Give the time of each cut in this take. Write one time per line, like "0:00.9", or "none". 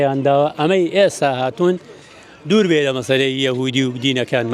none